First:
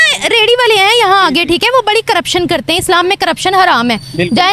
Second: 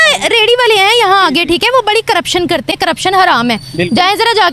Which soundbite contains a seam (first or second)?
second